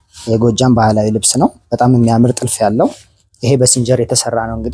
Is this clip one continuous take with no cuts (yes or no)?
yes